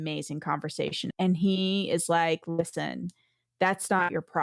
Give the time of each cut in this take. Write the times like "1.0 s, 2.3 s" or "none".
1.1 s

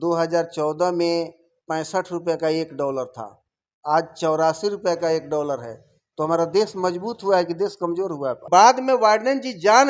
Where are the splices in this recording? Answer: 8.4 s

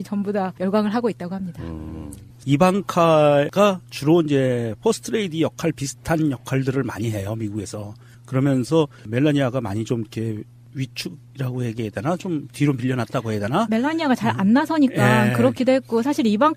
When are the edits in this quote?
none

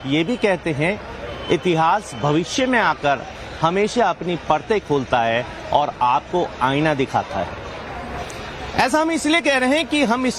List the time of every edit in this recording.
7.7 s

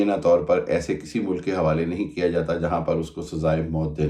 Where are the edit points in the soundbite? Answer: none

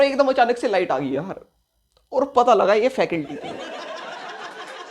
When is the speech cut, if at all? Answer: 3.6 s

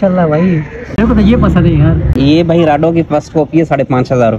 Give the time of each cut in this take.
1.0 s, 2.2 s

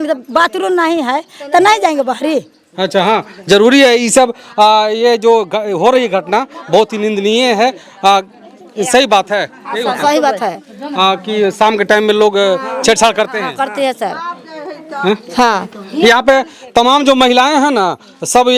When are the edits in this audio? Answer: none

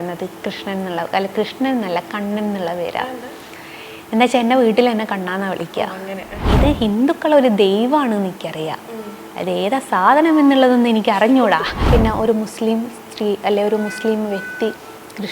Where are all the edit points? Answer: 6.3 s, 11.7 s

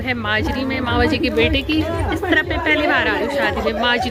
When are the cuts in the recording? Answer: none

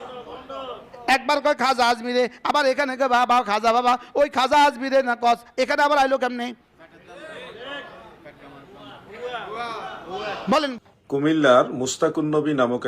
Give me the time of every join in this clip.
10.8 s

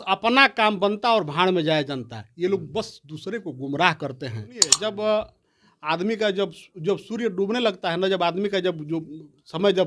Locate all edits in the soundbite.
4.9 s

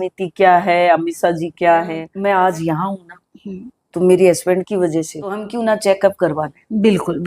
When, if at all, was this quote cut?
2.1 s, 5.5 s

